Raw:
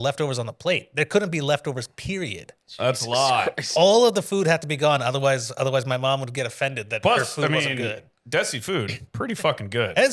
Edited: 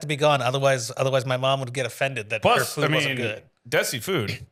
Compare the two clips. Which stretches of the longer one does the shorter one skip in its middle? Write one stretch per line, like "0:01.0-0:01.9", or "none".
none